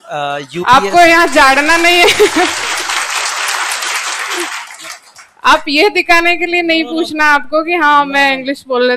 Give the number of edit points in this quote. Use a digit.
0